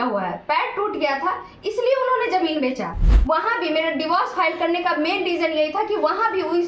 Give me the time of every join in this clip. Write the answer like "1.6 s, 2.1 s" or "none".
3.1 s